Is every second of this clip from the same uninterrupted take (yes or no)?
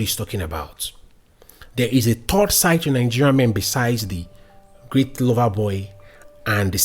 yes